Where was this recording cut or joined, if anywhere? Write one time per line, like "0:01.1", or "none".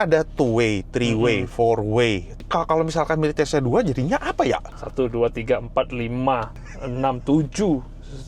0:02.4
0:04.7